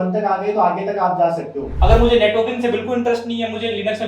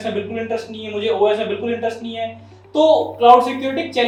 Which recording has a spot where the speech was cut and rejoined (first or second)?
first